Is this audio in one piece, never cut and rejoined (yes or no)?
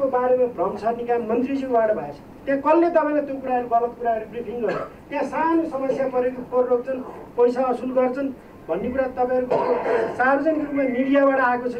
yes